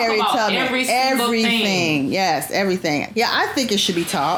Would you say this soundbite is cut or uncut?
uncut